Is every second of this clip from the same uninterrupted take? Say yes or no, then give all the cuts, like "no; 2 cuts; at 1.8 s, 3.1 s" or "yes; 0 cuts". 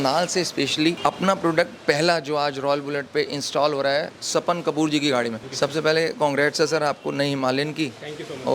no; 3 cuts; at 1.0 s, 4.2 s, 5.4 s